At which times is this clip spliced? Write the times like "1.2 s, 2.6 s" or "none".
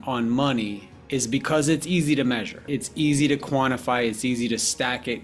2.7 s